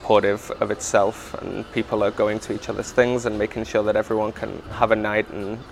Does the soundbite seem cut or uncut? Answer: uncut